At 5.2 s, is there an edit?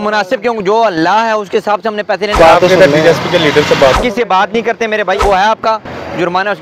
yes; 3 cuts; at 2.4 s, 3.9 s, 5.2 s

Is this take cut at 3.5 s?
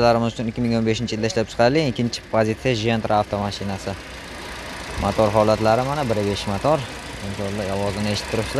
no; 0 cuts

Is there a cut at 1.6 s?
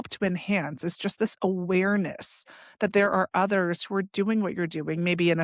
no; 0 cuts

